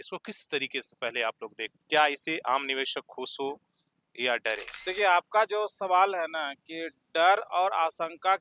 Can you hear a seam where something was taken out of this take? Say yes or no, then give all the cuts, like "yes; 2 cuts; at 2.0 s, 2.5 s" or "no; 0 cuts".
yes; 2 cuts; at 1.7 s, 4.7 s